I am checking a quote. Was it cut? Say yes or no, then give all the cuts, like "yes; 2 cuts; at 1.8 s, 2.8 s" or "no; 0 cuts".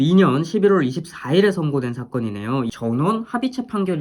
yes; 1 cut; at 2.7 s